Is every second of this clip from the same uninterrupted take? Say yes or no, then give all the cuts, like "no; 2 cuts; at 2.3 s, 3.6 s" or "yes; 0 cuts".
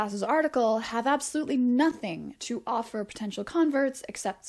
yes; 0 cuts